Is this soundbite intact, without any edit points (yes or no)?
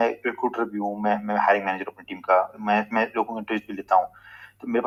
yes